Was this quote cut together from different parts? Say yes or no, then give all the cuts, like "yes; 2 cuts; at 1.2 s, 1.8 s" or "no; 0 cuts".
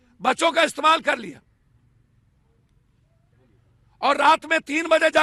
no; 0 cuts